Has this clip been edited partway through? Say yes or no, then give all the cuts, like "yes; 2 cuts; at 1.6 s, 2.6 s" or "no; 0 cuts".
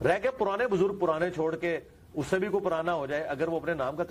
no; 0 cuts